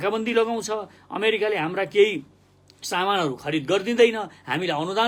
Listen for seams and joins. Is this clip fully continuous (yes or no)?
yes